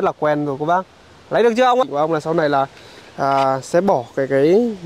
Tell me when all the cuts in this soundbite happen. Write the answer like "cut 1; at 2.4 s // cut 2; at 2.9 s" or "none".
cut 1; at 1.8 s